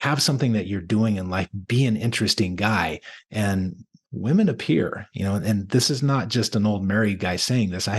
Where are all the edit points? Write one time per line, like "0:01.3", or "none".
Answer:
none